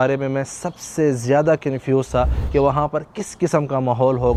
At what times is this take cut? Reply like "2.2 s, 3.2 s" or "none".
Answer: none